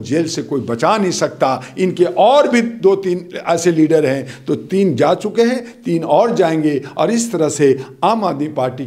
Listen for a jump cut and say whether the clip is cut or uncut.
uncut